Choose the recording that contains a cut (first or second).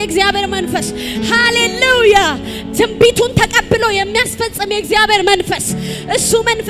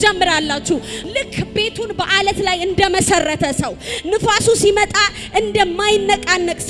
second